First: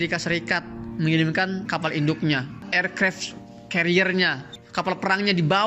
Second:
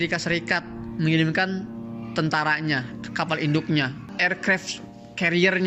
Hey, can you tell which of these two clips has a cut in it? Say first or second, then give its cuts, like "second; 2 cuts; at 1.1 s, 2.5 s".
first; 1 cut; at 1.6 s